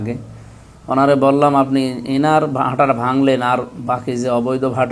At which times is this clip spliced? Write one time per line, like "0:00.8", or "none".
none